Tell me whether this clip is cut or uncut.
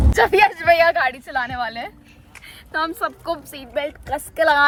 uncut